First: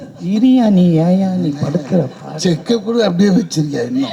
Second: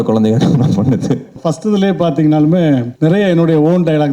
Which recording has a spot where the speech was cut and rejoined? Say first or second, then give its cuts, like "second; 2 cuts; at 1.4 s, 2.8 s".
second; 2 cuts; at 1.4 s, 2.9 s